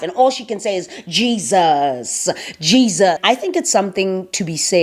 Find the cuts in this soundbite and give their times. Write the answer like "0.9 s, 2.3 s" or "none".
3.2 s